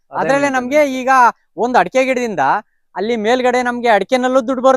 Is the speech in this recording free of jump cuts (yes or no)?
yes